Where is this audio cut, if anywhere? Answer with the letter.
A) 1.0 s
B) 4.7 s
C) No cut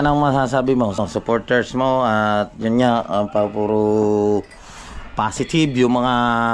A